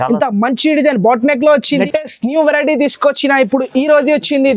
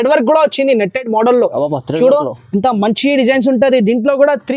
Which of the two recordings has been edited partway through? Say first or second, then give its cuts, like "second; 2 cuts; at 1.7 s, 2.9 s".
first; 1 cut; at 1.8 s